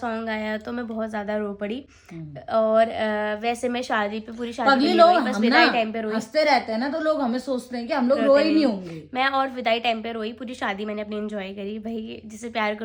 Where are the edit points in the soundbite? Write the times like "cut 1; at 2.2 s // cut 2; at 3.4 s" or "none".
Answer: none